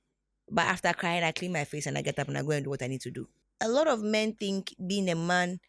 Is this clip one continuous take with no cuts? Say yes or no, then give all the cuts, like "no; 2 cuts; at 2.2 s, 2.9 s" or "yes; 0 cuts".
no; 1 cut; at 3.3 s